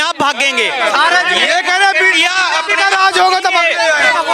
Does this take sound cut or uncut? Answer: uncut